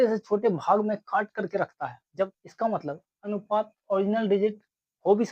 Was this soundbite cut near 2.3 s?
yes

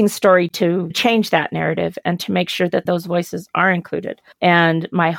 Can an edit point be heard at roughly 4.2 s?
yes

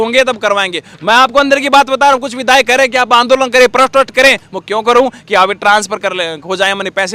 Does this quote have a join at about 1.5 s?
no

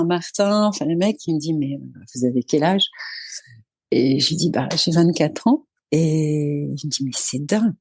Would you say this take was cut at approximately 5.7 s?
yes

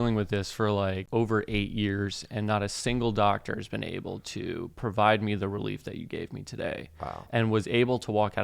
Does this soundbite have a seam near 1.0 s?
yes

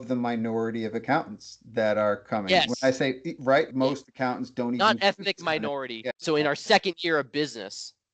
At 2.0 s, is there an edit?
no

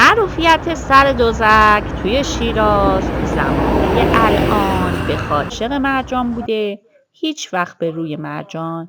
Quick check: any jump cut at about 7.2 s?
no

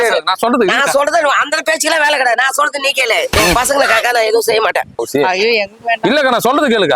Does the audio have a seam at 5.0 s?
yes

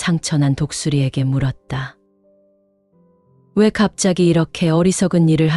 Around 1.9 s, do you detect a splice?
yes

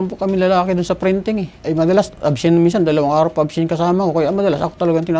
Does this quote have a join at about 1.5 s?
yes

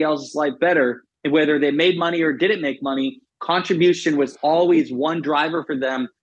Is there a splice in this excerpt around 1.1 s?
yes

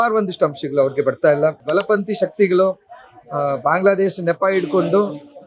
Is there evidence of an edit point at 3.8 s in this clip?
no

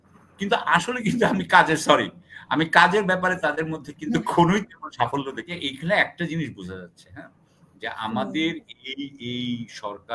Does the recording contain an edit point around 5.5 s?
yes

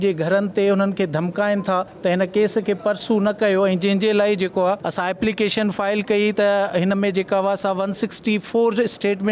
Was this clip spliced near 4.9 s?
yes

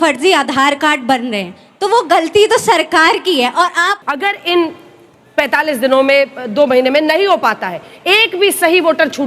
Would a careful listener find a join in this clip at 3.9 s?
yes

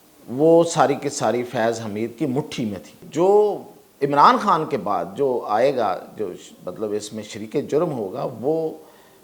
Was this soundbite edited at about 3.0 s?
yes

